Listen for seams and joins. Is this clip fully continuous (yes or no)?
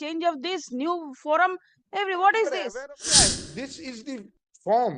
no